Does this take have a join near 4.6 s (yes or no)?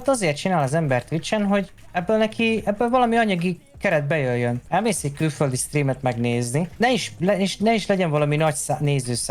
yes